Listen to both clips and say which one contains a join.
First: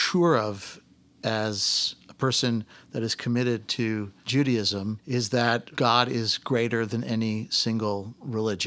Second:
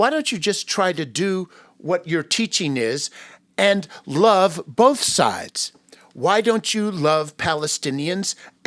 first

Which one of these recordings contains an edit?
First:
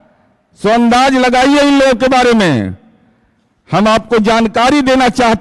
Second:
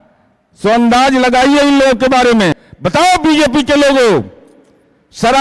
second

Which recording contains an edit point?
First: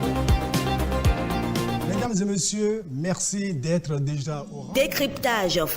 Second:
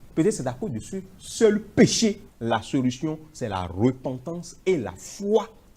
first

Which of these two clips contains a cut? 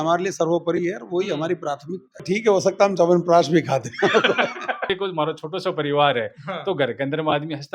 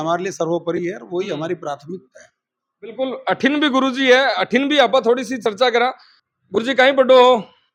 first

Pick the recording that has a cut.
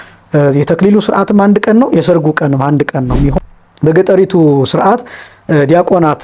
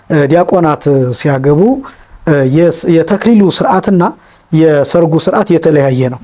first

